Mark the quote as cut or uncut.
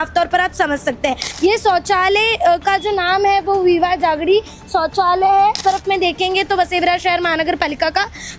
cut